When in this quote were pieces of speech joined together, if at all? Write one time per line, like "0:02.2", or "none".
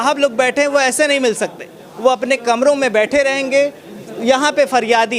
none

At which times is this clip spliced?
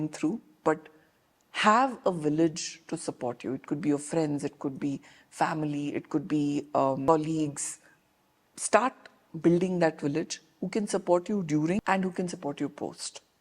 0:07.0
0:11.8

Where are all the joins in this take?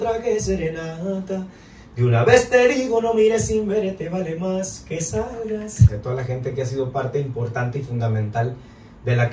0:05.9

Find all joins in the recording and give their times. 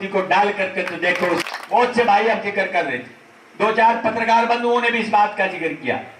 0:01.5

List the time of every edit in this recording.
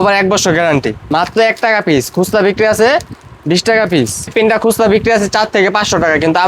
0:01.0
0:04.3

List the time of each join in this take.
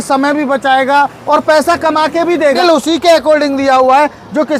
0:02.6

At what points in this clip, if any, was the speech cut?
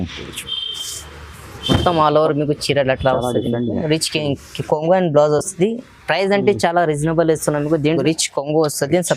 0:08.0

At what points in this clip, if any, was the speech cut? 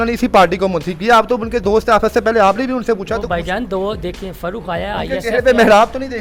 none

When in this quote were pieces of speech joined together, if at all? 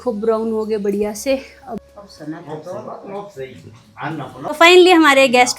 0:01.6
0:04.5

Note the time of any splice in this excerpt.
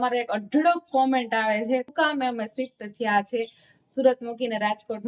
0:01.9

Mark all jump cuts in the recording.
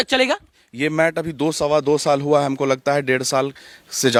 none

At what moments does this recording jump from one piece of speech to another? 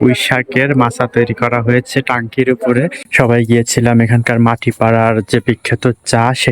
0:03.0

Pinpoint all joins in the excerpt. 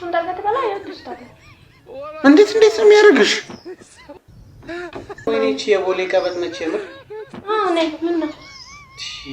0:05.3

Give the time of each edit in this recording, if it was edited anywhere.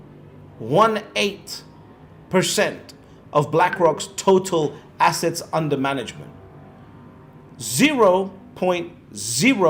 none

